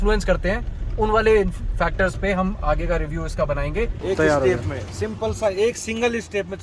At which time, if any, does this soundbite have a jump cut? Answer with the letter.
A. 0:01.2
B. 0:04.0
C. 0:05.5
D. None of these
B